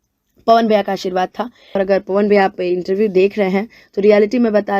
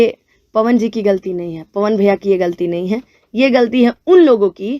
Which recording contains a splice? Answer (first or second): first